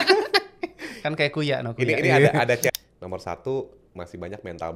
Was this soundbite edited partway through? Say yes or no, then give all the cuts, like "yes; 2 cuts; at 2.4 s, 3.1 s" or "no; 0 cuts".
yes; 1 cut; at 2.7 s